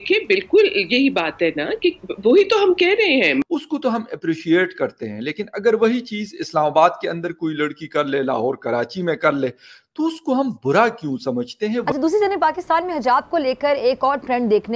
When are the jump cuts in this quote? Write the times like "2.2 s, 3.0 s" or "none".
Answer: 3.4 s, 11.9 s